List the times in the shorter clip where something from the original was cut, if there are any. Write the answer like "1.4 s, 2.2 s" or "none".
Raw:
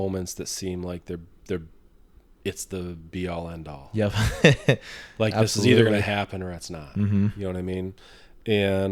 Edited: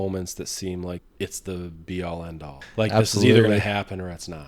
1.0 s, 2.5 s